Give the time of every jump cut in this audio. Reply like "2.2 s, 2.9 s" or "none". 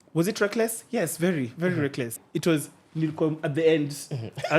2.2 s